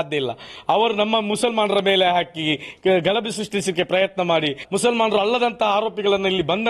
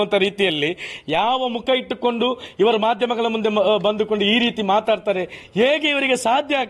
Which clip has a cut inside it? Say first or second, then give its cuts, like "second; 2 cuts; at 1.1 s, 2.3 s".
first; 1 cut; at 4.6 s